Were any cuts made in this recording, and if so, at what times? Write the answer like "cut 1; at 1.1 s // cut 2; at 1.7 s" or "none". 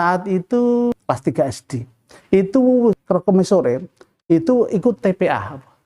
cut 1; at 1.0 s // cut 2; at 2.9 s